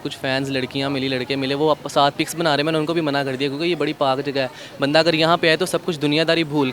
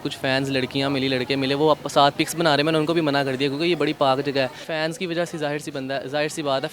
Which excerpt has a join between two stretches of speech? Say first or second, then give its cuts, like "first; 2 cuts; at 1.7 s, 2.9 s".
second; 1 cut; at 4.6 s